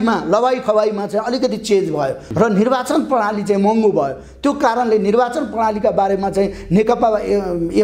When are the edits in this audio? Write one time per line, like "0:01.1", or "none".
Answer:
0:02.2